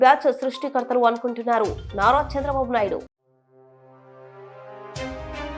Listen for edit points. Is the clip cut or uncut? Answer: uncut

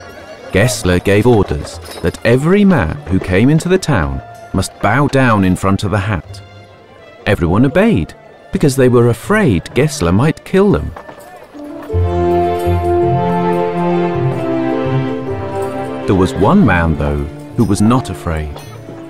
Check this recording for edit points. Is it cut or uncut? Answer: cut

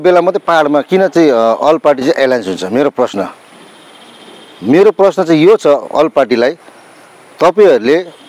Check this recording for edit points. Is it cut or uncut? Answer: uncut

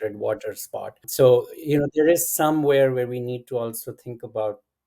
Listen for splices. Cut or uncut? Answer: cut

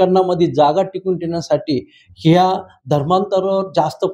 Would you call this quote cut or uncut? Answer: uncut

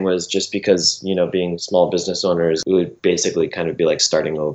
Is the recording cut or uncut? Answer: cut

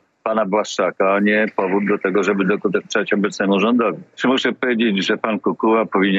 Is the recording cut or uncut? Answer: cut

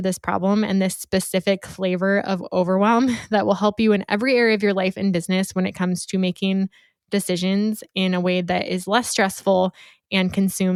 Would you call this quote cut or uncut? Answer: uncut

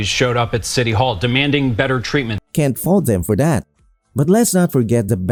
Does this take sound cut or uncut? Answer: uncut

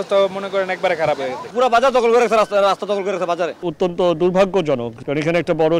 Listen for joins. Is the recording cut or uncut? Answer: cut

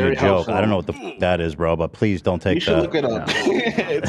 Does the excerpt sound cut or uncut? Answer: uncut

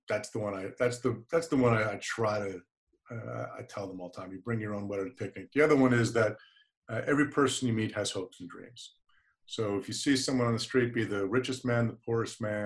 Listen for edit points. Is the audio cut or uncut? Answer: uncut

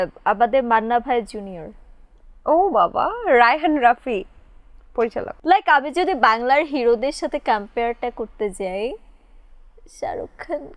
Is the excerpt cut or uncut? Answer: cut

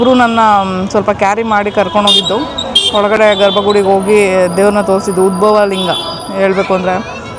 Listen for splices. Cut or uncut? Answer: uncut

